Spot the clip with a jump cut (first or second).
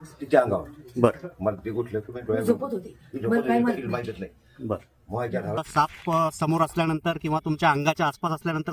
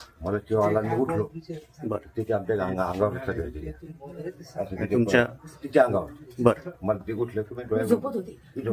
first